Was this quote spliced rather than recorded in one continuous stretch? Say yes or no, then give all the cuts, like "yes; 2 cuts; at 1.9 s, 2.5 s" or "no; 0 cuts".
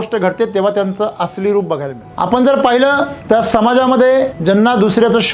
yes; 3 cuts; at 2.0 s, 3.2 s, 4.4 s